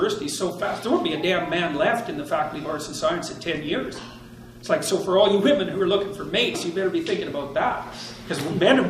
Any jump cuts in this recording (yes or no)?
no